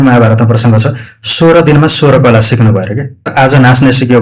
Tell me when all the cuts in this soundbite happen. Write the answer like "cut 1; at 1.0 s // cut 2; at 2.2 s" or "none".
cut 1; at 3.3 s